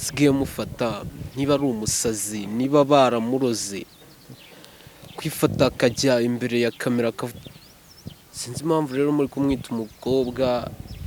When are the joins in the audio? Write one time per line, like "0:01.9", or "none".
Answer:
0:07.4